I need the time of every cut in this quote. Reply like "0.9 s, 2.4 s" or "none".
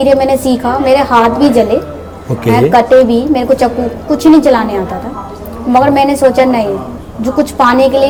none